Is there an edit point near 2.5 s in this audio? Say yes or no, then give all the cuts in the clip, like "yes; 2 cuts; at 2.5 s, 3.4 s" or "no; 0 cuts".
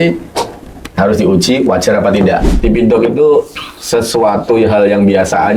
yes; 1 cut; at 2.5 s